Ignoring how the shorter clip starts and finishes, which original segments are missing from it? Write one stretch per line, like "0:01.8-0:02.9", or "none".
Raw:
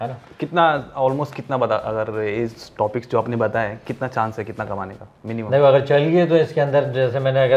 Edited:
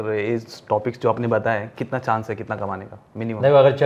none